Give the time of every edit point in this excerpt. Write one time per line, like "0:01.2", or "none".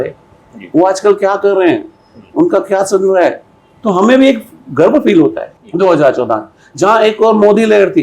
0:05.5